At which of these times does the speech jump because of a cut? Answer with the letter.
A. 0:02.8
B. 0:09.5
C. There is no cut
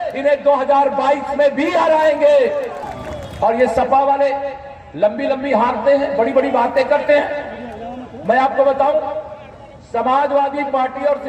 A